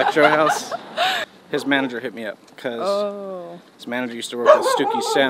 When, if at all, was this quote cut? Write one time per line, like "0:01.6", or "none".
0:01.2